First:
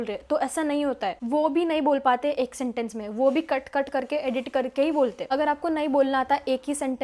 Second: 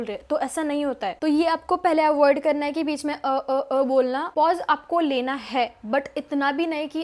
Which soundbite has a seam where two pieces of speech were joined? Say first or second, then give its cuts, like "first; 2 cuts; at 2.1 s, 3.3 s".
second; 2 cuts; at 1.2 s, 4.3 s